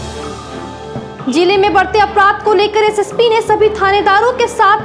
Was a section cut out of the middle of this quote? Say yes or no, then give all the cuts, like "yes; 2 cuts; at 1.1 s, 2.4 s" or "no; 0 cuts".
no; 0 cuts